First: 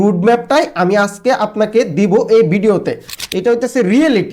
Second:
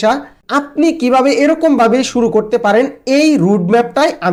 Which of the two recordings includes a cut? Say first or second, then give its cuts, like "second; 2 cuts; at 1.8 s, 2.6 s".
first; 1 cut; at 3.1 s